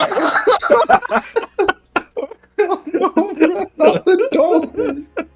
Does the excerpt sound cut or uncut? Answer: cut